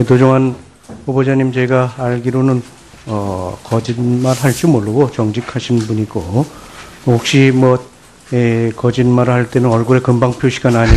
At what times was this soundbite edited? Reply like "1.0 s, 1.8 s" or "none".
none